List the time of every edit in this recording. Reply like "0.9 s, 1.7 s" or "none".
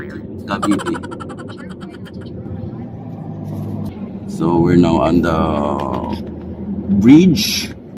2.6 s